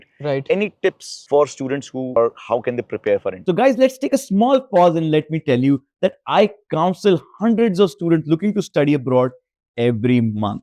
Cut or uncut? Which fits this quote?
uncut